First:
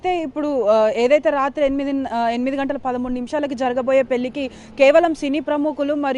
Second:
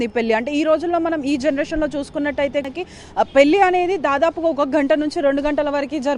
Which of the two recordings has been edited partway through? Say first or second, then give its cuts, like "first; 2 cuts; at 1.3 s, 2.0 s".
second; 1 cut; at 2.7 s